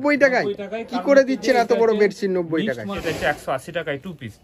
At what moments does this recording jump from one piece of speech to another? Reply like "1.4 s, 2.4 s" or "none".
2.9 s